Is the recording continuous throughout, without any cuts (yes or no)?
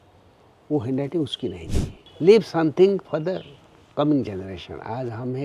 no